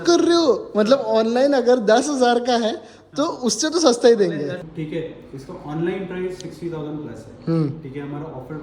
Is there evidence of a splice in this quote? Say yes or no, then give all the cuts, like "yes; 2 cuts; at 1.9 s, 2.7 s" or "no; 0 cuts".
yes; 1 cut; at 4.7 s